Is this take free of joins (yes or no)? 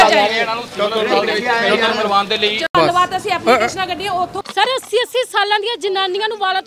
no